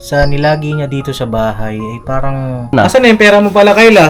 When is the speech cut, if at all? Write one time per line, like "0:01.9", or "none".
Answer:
0:02.7